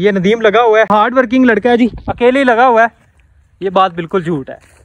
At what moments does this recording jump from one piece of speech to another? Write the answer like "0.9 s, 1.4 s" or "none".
0.9 s